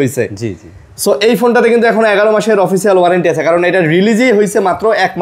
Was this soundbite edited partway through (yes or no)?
no